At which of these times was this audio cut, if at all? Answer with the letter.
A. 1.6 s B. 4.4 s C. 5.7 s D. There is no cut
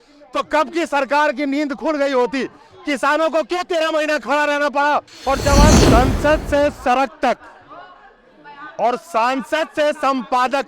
C